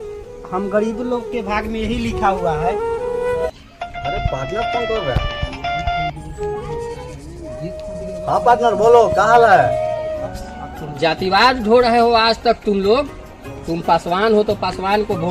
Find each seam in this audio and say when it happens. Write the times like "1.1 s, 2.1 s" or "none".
3.4 s, 10.3 s